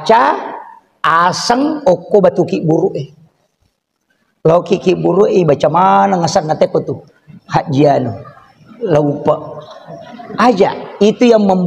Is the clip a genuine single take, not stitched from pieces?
yes; 0 cuts

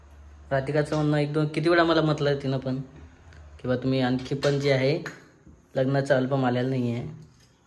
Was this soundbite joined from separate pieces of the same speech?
no; 0 cuts

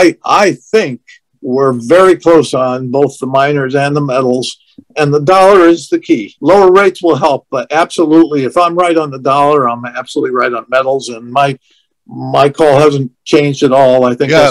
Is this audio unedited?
no; 1 cut; at 6.3 s

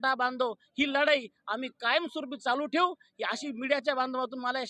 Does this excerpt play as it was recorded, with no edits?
yes; 0 cuts

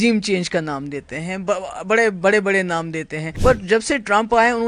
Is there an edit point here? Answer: yes; 1 cut; at 3.2 s

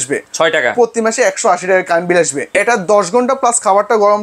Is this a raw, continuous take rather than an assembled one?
no; 1 cut; at 2.5 s

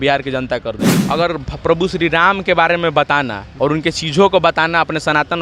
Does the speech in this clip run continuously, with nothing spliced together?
no; 2 cuts; at 0.9 s, 3.4 s

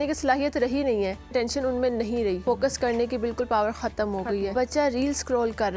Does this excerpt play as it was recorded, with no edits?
no; 3 cuts; at 1.3 s, 2.4 s, 4.5 s

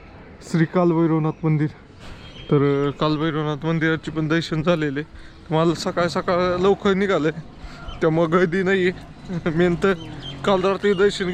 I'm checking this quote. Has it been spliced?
no; 0 cuts

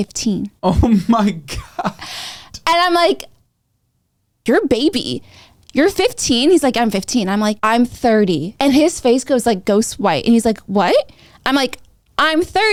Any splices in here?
no; 0 cuts

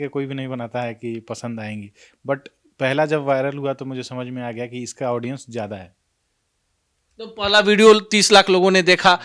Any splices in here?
no; 0 cuts

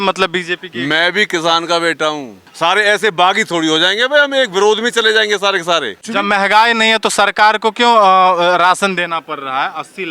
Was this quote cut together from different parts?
yes; 2 cuts; at 2.4 s, 6.0 s

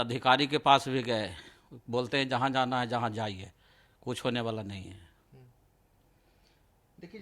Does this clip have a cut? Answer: no; 0 cuts

